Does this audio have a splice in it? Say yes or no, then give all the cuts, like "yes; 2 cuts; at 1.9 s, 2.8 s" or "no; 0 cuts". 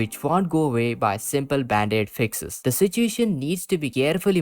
yes; 1 cut; at 2.6 s